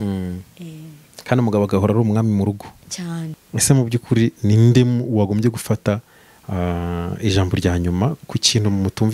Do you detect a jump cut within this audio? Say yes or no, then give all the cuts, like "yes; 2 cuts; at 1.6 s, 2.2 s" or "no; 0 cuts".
yes; 1 cut; at 3.4 s